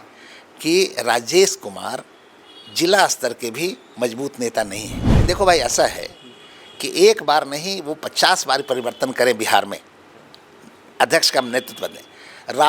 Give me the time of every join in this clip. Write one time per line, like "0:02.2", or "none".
0:04.9